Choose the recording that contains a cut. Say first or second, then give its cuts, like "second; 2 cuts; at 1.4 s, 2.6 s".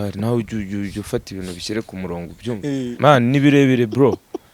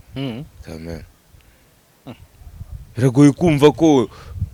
first; 1 cut; at 2.9 s